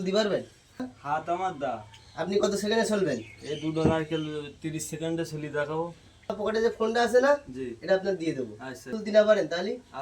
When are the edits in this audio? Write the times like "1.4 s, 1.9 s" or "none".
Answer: 0.9 s, 6.4 s, 8.9 s